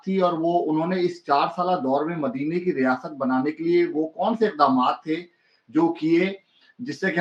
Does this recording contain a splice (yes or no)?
no